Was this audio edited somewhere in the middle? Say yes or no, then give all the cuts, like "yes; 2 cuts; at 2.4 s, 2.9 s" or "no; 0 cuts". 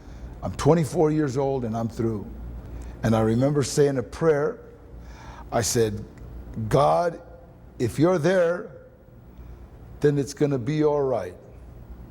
yes; 1 cut; at 2.4 s